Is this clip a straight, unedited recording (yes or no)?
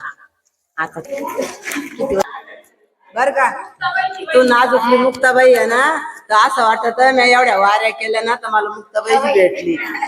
no